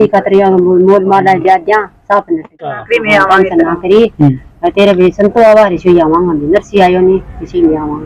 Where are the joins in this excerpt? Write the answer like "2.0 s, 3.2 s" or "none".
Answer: 2.8 s